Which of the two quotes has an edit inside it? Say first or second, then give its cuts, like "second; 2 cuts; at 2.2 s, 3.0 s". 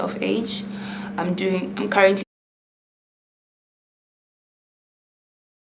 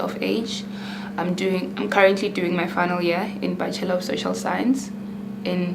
second; 1 cut; at 2.2 s